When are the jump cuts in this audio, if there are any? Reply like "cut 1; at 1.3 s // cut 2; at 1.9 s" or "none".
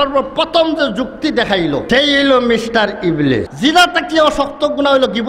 cut 1; at 1.8 s // cut 2; at 3.5 s